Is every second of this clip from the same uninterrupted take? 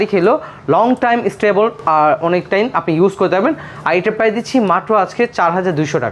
yes; 0 cuts

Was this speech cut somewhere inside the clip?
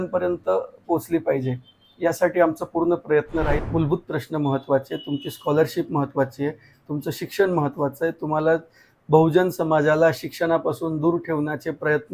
yes; 1 cut; at 3.6 s

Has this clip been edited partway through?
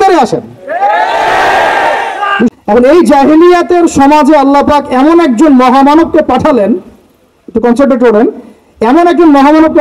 yes; 1 cut; at 2.5 s

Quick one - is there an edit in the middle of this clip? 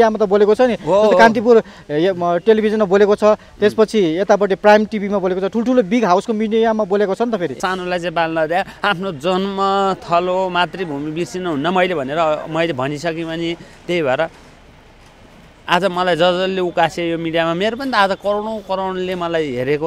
no; 0 cuts

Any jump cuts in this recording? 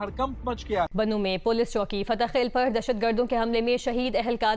yes; 1 cut; at 0.9 s

